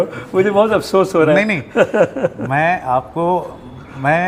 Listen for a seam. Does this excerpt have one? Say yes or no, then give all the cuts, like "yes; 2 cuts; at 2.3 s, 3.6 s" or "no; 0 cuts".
no; 0 cuts